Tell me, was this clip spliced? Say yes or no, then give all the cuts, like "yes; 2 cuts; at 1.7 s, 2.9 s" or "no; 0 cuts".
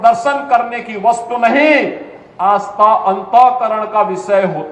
no; 0 cuts